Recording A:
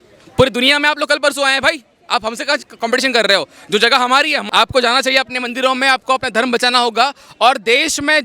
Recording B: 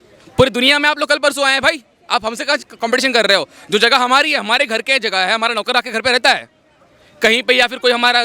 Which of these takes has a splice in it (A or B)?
A